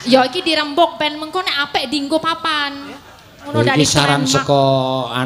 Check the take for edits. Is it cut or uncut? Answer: cut